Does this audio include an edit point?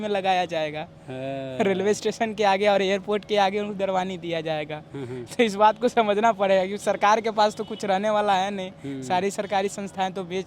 no; 0 cuts

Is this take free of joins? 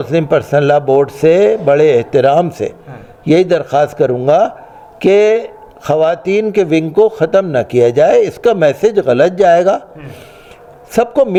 yes; 0 cuts

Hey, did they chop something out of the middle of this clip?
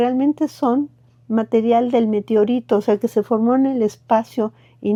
no; 0 cuts

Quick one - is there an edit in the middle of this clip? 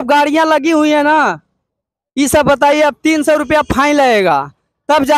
no; 0 cuts

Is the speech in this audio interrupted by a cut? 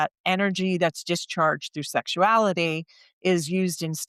no; 0 cuts

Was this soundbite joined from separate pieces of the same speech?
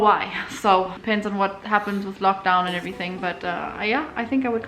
yes; 1 cut; at 1.0 s

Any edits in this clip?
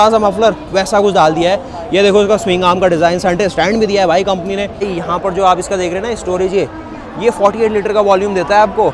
yes; 1 cut; at 4.8 s

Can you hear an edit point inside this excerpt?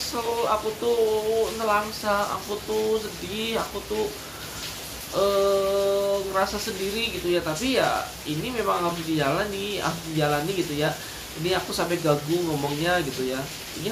no; 0 cuts

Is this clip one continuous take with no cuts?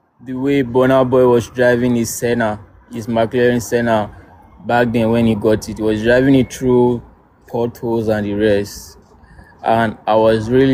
yes; 0 cuts

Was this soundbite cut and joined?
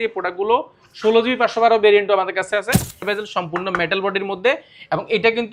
yes; 1 cut; at 3.0 s

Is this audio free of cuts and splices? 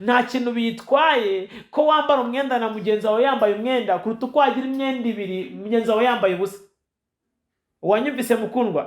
yes; 0 cuts

